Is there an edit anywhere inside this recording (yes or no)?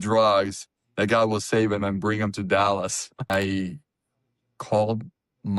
yes